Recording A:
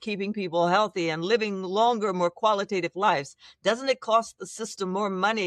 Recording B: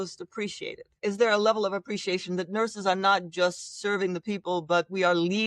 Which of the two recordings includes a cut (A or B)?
B